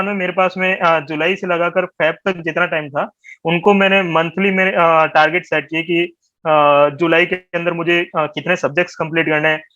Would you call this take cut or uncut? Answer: uncut